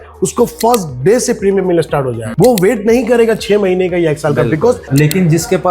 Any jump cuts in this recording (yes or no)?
yes